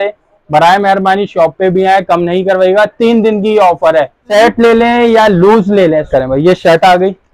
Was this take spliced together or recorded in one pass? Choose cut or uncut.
cut